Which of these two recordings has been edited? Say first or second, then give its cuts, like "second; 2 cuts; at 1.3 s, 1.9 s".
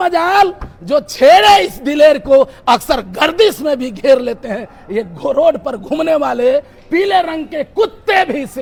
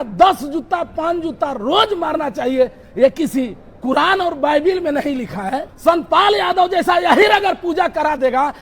second; 1 cut; at 5.6 s